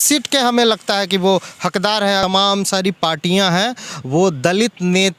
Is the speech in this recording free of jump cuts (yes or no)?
no